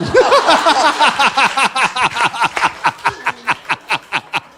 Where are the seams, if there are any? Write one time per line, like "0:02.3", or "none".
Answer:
none